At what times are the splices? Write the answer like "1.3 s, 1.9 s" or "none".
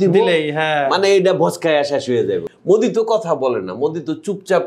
2.5 s